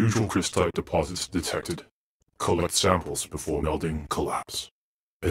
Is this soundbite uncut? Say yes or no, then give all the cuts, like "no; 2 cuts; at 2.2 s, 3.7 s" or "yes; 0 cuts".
yes; 0 cuts